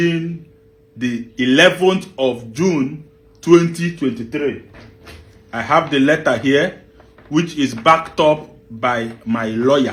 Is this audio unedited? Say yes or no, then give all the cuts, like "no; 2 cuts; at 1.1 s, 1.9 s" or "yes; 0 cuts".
yes; 0 cuts